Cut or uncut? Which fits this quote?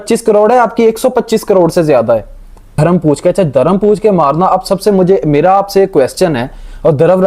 cut